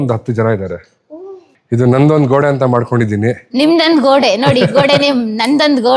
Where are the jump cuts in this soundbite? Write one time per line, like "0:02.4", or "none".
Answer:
0:01.5